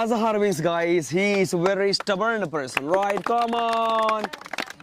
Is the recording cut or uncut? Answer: uncut